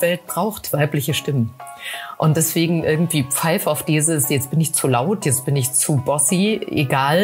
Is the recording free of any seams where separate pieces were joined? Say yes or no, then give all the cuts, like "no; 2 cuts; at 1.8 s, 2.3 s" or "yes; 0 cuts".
yes; 0 cuts